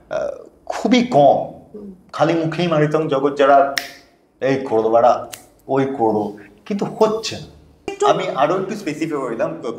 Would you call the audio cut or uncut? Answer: cut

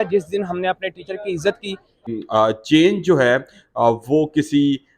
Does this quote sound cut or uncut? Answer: cut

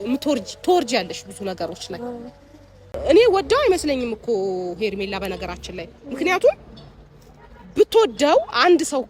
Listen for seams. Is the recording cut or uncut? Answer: cut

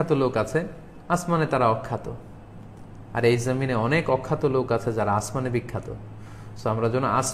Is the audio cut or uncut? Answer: uncut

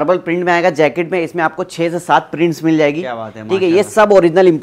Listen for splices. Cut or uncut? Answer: uncut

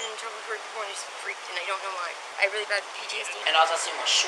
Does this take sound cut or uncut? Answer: cut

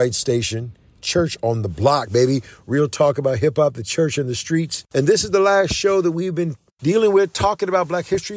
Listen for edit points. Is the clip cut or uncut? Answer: cut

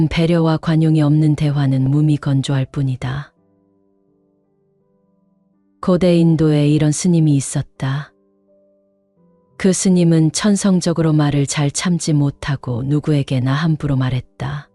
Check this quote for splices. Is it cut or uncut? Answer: uncut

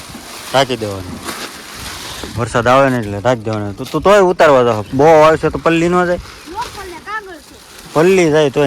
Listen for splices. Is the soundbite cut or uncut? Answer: uncut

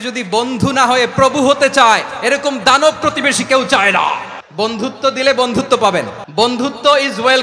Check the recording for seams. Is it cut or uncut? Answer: cut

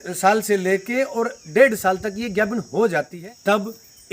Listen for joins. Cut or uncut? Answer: cut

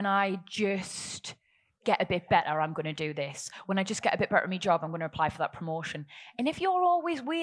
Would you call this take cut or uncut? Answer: uncut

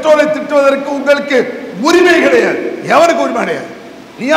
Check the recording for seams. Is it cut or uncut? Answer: uncut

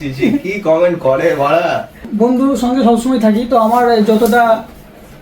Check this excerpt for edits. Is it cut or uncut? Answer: cut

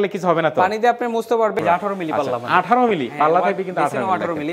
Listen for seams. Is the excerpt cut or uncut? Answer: cut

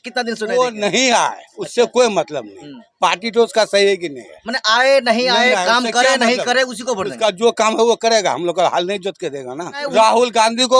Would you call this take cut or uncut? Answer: cut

